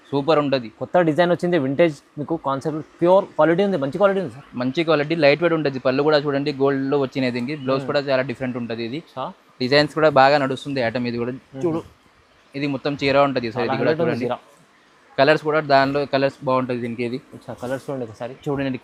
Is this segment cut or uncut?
uncut